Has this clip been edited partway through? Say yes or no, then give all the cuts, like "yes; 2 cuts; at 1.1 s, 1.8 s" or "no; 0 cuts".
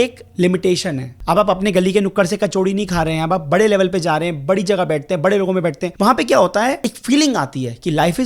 yes; 3 cuts; at 1.2 s, 5.9 s, 6.9 s